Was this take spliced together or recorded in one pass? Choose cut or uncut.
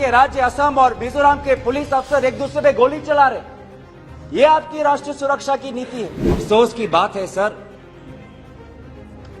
cut